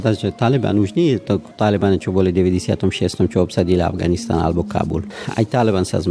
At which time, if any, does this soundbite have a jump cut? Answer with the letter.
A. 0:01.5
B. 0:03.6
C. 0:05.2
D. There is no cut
C